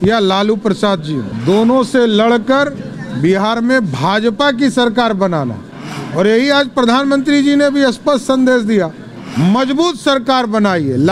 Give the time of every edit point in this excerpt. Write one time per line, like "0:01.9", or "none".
0:01.3